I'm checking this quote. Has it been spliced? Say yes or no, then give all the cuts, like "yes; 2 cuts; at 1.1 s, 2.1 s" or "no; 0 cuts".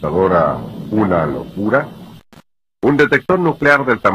yes; 1 cut; at 2.7 s